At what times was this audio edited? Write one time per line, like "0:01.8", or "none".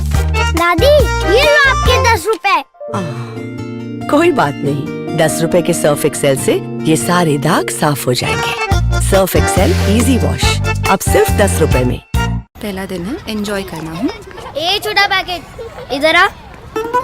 0:12.5